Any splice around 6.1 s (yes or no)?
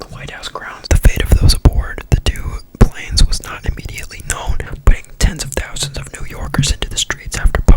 no